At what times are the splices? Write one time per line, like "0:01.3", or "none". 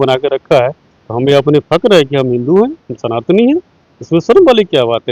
none

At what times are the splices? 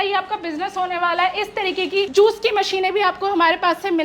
0:02.1

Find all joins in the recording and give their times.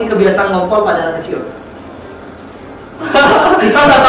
none

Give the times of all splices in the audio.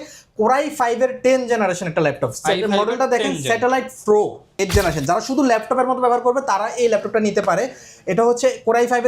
0:04.6

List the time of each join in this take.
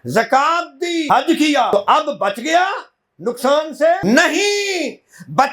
0:01.1
0:01.7
0:04.0

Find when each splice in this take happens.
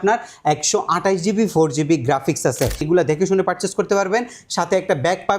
0:02.9

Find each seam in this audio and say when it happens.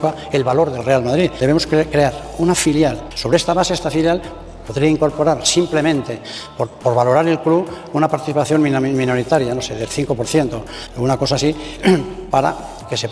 0:01.4
0:03.1
0:10.8

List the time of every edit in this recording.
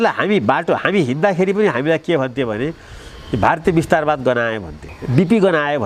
0:04.9

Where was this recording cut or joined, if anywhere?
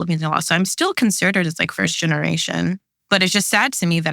0:02.9

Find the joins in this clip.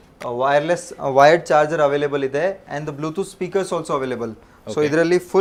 none

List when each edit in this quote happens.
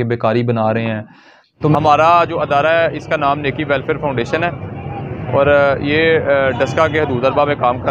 0:01.7

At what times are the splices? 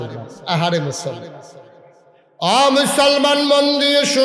none

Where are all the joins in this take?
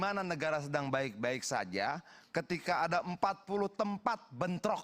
none

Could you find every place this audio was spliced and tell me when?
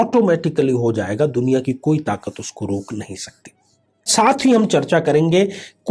0:04.1

